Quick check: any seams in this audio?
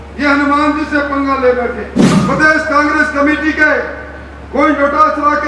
yes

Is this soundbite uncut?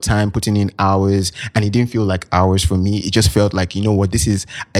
yes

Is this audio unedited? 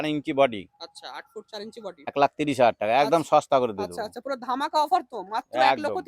no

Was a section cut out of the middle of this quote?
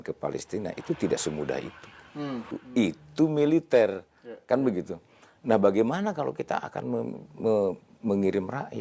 yes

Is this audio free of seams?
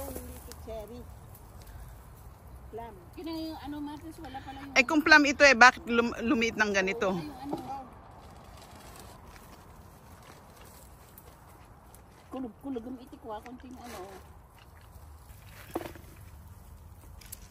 no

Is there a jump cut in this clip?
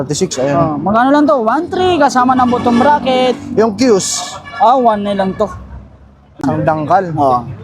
yes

